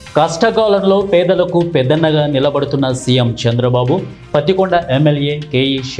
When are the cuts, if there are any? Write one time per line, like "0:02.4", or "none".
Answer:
none